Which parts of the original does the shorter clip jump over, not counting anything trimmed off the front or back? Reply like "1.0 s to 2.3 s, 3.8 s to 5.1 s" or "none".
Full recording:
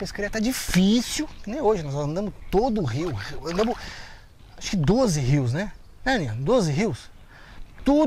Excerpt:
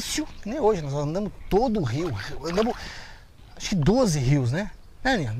none